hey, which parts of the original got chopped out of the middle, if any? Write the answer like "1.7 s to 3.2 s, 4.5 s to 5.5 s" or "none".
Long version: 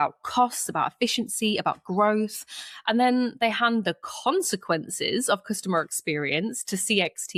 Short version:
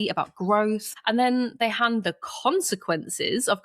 2.4 s to 2.7 s